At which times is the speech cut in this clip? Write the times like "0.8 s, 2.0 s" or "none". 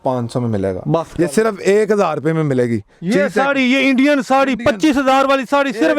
1.1 s